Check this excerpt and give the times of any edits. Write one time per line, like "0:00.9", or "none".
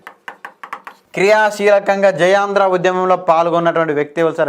none